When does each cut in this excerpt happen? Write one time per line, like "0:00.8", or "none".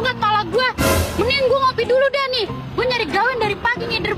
0:01.0